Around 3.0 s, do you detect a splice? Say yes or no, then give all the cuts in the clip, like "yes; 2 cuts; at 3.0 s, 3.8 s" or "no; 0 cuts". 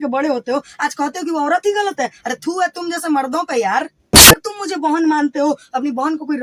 no; 1 cut; at 4.4 s